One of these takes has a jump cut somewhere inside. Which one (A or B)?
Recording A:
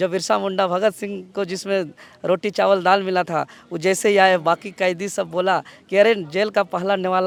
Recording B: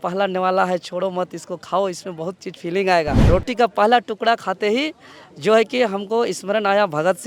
B